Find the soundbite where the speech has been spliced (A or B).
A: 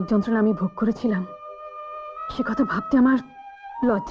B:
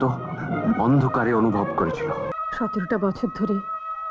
B